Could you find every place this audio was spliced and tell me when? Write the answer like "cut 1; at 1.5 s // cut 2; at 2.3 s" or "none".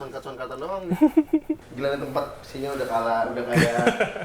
cut 1; at 1.7 s

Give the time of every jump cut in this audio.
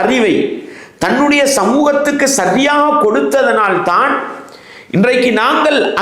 none

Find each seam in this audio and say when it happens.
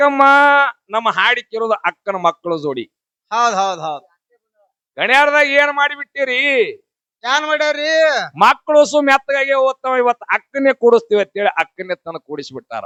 none

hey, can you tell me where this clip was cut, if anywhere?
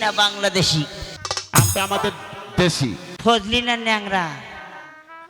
cut 1; at 1.0 s // cut 2; at 3.1 s

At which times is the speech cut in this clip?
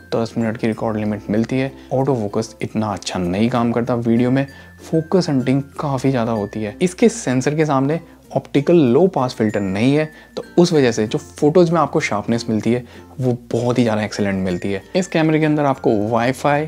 cut 1; at 1.8 s // cut 2; at 6.6 s // cut 3; at 14.8 s

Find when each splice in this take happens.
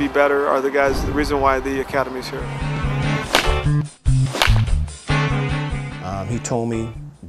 cut 1; at 6.1 s

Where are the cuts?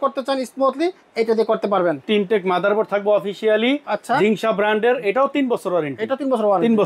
cut 1; at 2.0 s

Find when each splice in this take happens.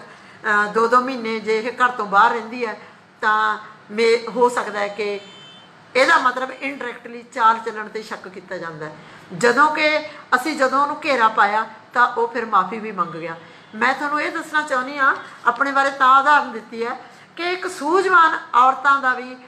none

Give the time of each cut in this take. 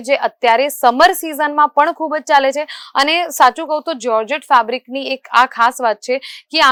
none

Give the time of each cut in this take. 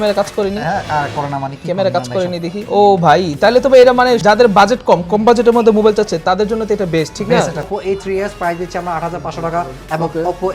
cut 1; at 2.6 s // cut 2; at 4.2 s // cut 3; at 7.7 s

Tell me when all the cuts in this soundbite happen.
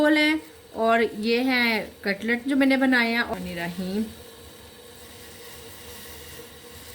cut 1; at 3.3 s

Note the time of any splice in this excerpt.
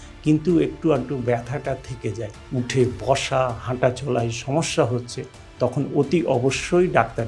cut 1; at 2.3 s

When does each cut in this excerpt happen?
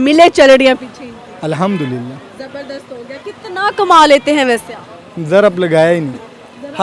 none

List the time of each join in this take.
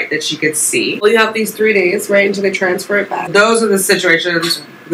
cut 1; at 1.0 s // cut 2; at 3.3 s

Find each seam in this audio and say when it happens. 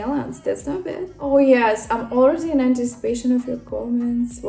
cut 1; at 1.1 s

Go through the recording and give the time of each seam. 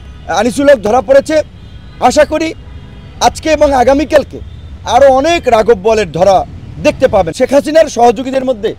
cut 1; at 7.3 s

